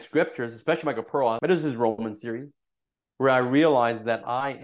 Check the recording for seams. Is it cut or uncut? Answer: cut